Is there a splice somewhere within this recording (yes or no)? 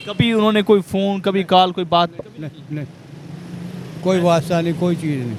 no